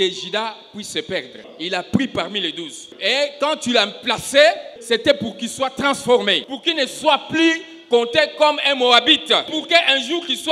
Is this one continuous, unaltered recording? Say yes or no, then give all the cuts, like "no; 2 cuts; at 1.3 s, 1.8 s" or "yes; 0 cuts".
no; 5 cuts; at 1.5 s, 2.9 s, 4.7 s, 6.4 s, 9.5 s